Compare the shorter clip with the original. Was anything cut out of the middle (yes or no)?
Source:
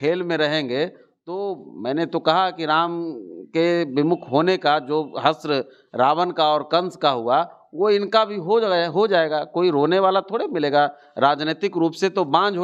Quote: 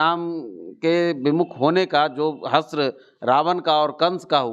no